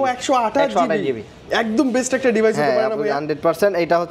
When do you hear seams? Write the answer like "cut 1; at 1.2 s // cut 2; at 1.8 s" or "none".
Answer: none